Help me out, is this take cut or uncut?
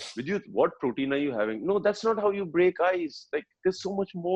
uncut